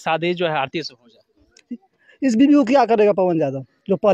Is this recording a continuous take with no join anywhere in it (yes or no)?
yes